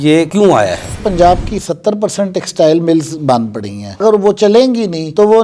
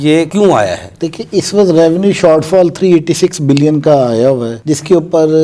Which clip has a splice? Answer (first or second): first